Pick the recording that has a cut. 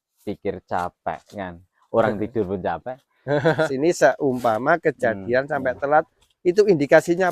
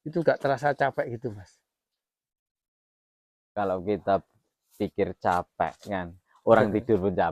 first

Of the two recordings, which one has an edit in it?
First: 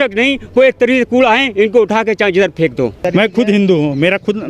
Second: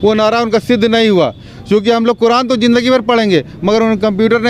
first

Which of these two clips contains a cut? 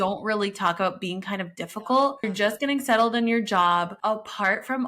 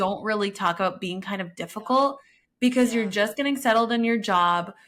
first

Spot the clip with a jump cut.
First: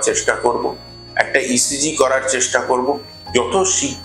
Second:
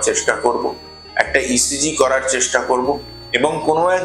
first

